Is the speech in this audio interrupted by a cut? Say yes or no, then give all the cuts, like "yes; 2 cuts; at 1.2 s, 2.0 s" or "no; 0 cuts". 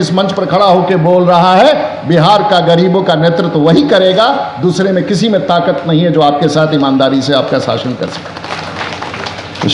no; 0 cuts